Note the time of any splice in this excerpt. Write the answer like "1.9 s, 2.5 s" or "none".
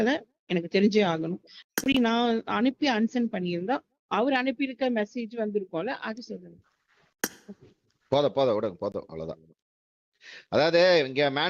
none